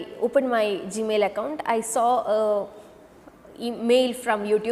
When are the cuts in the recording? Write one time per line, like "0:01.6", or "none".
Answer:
none